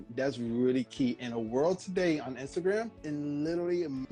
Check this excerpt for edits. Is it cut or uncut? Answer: uncut